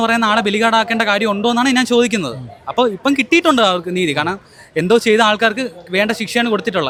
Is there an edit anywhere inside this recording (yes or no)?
no